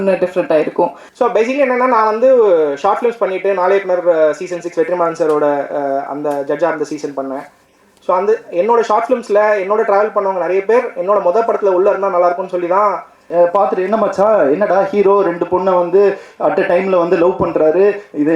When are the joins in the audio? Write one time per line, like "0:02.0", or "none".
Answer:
0:01.0
0:13.1